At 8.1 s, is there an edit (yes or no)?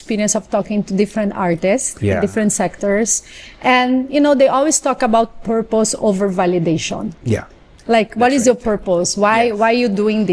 no